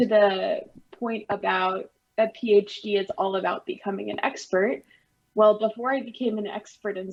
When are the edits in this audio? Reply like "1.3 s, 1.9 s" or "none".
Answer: none